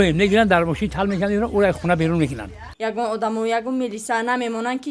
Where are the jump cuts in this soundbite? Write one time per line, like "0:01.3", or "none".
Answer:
0:02.7